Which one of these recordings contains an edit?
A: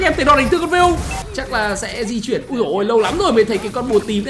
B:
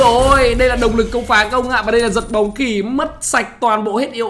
A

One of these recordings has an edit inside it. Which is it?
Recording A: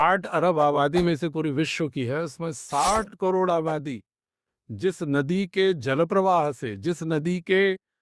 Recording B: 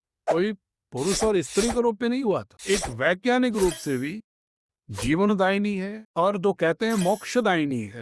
B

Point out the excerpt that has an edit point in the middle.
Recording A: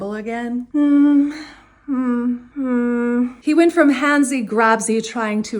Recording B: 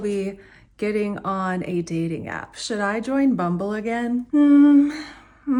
A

